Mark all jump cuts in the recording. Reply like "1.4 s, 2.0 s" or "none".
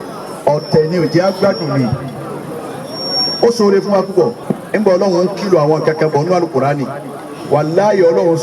4.4 s